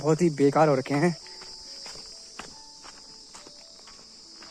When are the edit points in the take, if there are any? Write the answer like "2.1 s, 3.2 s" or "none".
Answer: none